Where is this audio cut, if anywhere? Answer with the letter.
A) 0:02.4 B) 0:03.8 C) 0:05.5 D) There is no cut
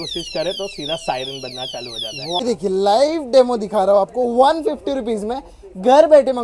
A